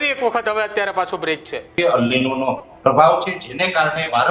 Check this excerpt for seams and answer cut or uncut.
cut